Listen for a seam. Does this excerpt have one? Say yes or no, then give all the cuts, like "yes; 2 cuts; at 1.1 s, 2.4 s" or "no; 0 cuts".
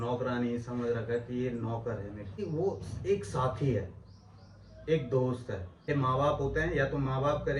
yes; 2 cuts; at 2.4 s, 5.9 s